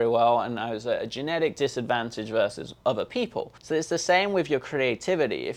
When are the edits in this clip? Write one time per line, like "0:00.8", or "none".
0:02.7
0:03.6